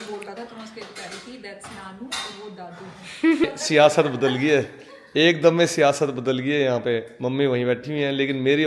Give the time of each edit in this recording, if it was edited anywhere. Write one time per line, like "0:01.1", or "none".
0:03.4